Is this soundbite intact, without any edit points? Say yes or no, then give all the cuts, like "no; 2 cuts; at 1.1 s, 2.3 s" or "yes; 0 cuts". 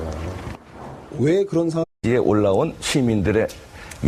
yes; 0 cuts